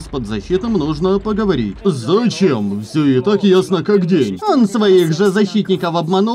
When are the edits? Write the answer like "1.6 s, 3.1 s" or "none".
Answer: 1.7 s, 4.4 s